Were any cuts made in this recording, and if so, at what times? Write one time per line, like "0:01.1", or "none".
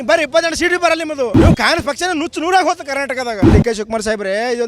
0:01.4
0:03.5

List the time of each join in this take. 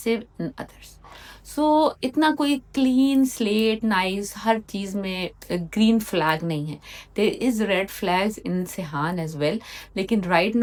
none

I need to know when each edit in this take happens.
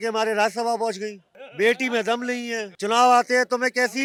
none

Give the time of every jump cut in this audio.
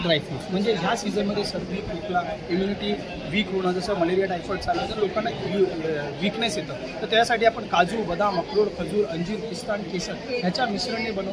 none

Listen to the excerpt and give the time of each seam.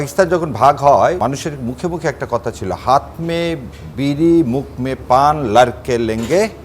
0:01.2

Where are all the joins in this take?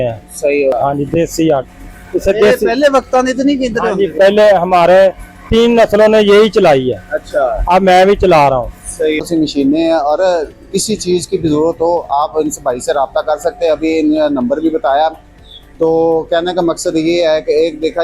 0:00.7
0:09.2

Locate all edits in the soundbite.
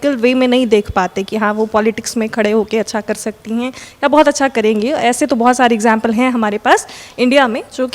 none

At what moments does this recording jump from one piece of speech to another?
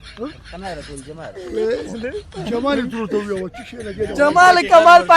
0:01.4

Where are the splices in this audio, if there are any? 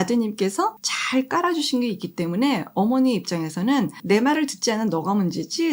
0:00.9
0:04.0

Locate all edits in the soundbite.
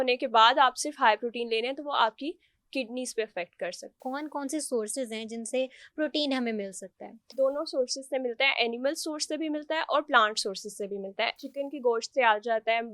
0:04.0
0:07.3
0:11.4

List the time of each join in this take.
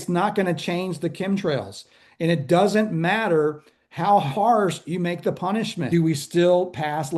0:05.8

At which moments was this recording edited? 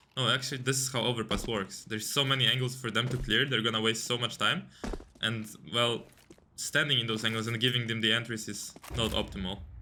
none

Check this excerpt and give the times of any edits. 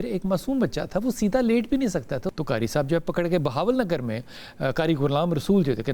0:02.3

